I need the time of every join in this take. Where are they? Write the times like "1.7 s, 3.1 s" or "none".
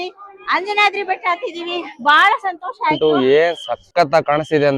3.0 s